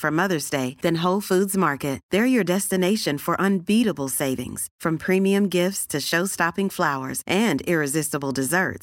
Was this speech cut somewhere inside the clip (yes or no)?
no